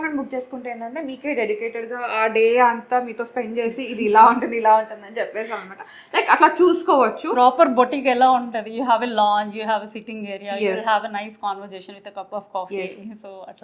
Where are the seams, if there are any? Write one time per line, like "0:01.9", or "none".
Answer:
none